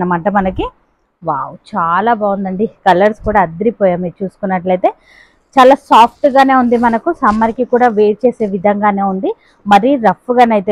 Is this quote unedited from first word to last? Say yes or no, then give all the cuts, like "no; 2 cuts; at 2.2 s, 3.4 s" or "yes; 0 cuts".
yes; 0 cuts